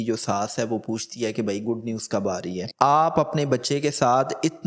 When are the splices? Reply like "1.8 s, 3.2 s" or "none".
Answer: 2.7 s